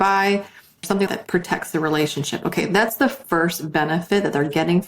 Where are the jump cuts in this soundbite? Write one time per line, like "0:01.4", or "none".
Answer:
0:00.9